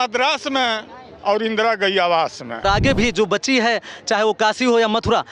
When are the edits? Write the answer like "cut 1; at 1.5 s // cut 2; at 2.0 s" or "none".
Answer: cut 1; at 2.6 s